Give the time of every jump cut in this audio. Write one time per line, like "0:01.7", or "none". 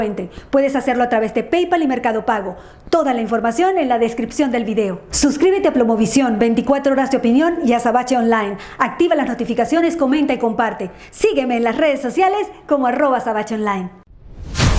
0:13.9